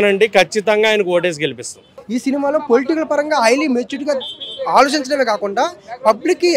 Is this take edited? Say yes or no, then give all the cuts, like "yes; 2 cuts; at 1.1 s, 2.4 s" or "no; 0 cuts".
yes; 1 cut; at 1.8 s